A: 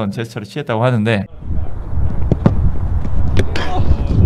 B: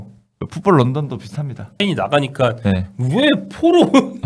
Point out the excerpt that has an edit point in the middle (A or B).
B